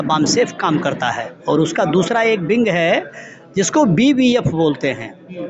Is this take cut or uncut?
uncut